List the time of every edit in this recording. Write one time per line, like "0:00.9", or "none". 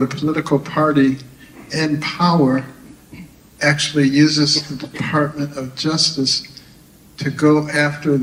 none